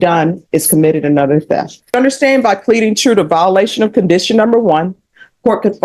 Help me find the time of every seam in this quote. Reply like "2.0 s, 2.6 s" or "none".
1.9 s